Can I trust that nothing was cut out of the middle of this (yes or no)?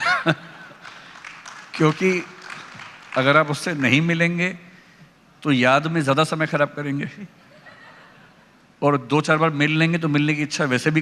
yes